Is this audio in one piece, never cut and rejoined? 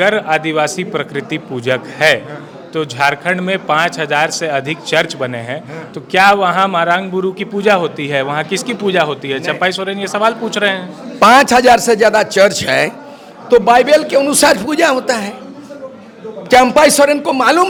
yes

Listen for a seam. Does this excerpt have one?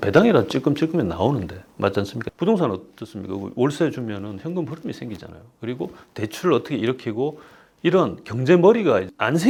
no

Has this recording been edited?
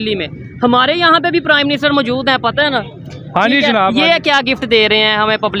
no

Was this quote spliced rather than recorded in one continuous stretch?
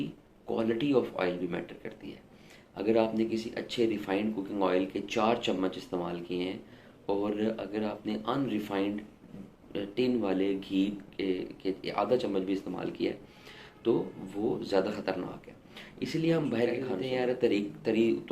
yes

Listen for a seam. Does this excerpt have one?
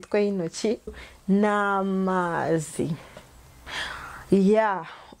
yes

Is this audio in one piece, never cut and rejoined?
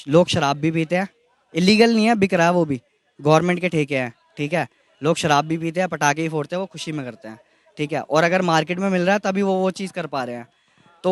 yes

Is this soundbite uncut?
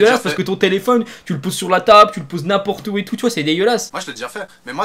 no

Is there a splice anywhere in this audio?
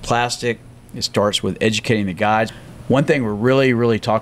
yes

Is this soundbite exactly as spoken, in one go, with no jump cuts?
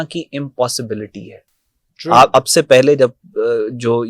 yes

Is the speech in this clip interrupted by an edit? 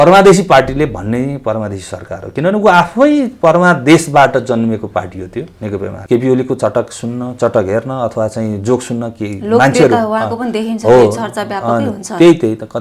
yes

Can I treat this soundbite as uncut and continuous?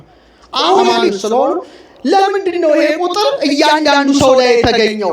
no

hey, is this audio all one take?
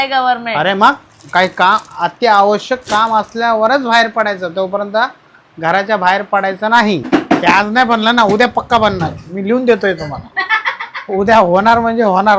no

